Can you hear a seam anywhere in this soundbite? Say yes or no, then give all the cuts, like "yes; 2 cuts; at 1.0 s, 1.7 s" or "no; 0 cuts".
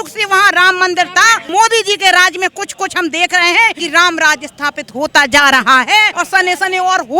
yes; 3 cuts; at 1.5 s, 3.8 s, 6.2 s